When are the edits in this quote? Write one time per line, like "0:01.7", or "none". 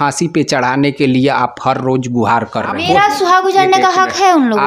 0:02.8